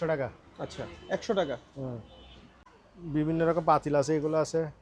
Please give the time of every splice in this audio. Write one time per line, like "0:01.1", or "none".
none